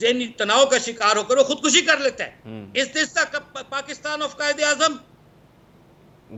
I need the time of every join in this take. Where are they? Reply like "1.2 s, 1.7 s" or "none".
none

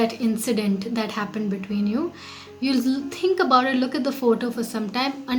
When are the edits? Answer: none

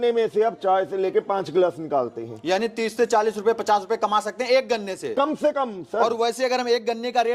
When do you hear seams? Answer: none

